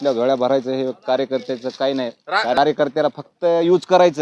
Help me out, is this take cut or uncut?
cut